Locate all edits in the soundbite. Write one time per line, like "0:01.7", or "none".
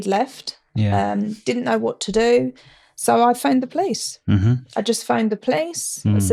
none